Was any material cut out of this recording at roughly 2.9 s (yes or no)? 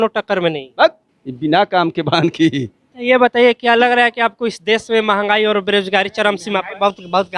yes